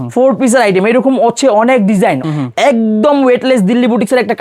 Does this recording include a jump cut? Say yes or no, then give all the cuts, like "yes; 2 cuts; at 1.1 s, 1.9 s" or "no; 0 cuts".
yes; 1 cut; at 2.2 s